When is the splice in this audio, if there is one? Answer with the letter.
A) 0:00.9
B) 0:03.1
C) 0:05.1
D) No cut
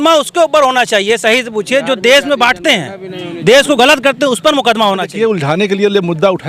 C